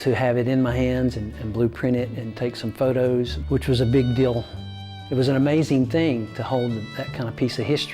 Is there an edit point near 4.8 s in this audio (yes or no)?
no